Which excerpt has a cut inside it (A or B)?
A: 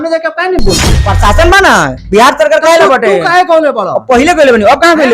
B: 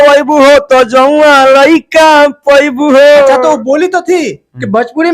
A